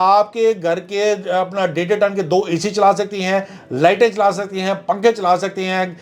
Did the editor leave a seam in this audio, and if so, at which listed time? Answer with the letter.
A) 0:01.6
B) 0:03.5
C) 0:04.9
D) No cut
D